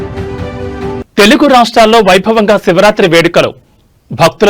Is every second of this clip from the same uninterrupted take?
yes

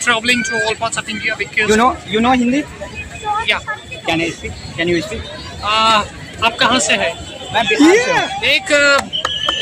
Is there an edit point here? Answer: yes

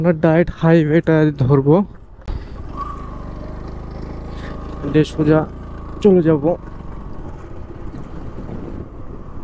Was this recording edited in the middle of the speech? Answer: no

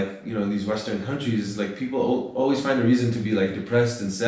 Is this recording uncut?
yes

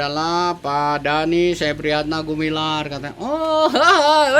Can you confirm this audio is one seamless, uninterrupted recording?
yes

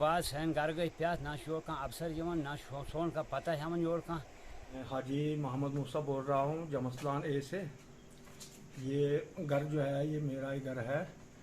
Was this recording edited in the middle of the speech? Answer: yes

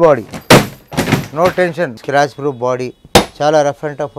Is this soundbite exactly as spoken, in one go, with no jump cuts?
no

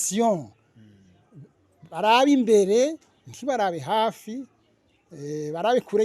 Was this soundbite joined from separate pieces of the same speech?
no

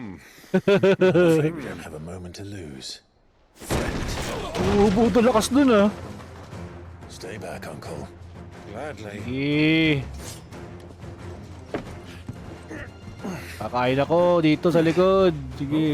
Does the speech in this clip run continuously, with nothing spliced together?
yes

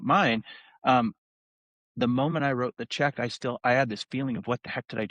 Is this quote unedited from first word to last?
yes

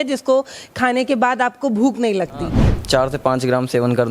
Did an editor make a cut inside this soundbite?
yes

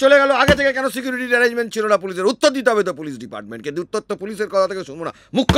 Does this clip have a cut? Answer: no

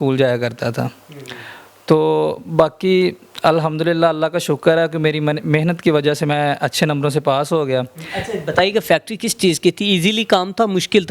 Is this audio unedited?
yes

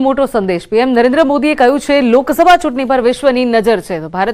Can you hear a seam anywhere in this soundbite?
no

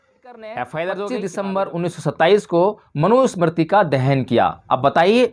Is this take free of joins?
no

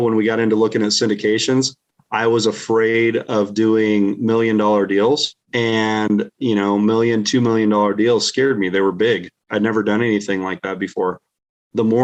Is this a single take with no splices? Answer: yes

